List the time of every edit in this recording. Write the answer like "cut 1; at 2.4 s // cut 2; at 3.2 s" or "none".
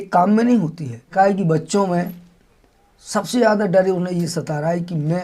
cut 1; at 1.1 s